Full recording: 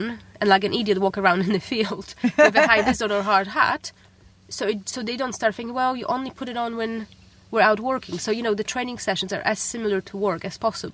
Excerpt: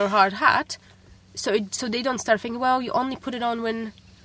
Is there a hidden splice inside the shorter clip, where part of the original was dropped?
no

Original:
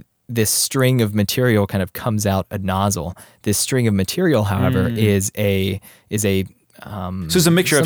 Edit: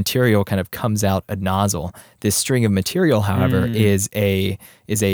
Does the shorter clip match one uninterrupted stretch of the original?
yes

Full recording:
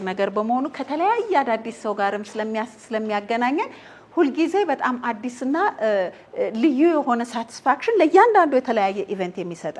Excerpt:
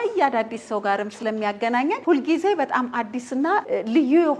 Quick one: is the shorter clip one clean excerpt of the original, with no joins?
no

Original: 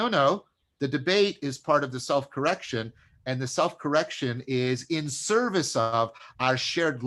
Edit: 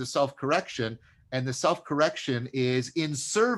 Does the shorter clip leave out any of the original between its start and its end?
no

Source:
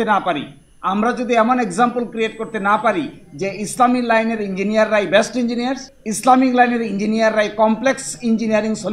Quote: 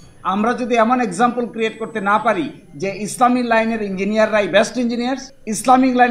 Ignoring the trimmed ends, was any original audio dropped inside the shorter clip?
no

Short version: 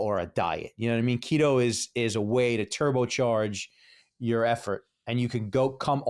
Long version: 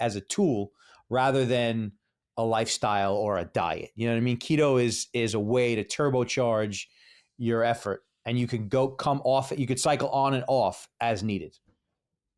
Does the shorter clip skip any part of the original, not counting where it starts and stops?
no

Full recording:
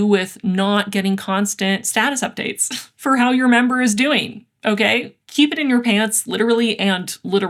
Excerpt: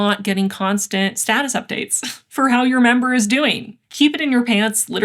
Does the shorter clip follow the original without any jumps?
no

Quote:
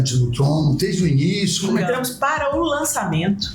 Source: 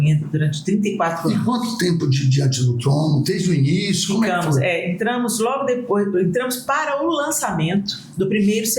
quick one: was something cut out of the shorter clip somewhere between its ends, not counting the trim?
yes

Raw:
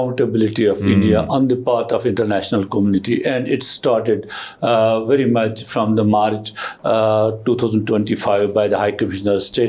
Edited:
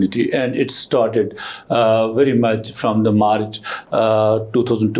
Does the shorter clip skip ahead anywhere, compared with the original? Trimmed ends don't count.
no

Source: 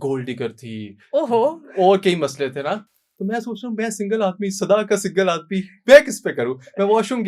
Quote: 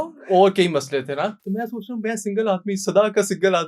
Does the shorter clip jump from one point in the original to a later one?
yes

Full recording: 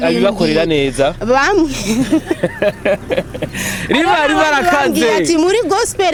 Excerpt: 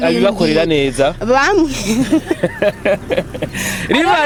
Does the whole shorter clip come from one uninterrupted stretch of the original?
yes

